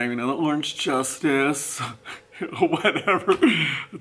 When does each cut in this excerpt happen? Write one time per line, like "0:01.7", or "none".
none